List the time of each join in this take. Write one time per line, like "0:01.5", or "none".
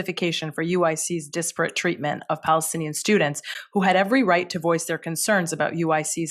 none